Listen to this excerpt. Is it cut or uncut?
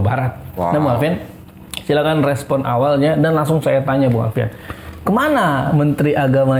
uncut